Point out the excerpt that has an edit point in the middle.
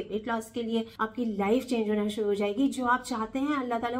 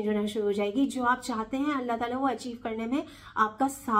first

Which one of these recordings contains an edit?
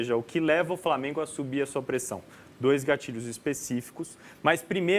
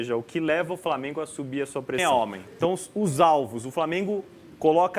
second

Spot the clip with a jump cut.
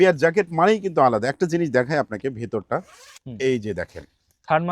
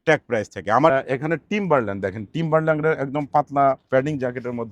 second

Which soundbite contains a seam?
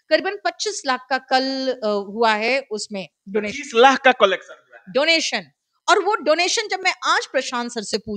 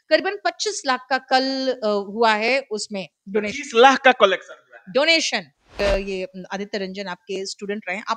second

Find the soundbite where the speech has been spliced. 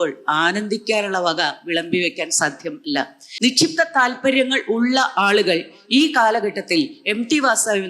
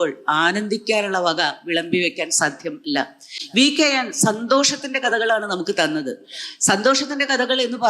first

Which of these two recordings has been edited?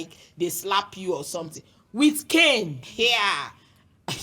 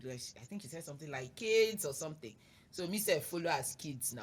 first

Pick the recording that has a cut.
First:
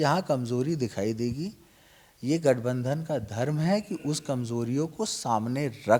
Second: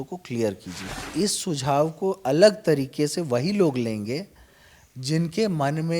second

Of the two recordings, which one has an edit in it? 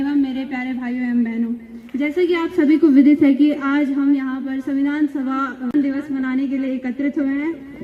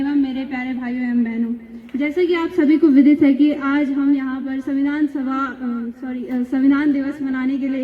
first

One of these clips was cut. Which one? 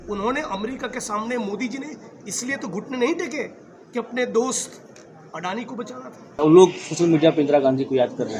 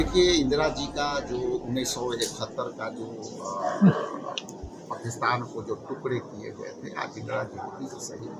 first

